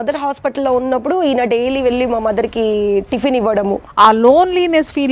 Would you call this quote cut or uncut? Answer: cut